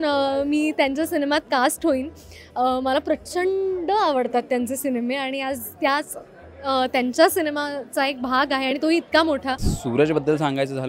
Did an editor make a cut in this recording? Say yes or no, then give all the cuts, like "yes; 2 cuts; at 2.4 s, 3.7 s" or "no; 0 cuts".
yes; 1 cut; at 9.7 s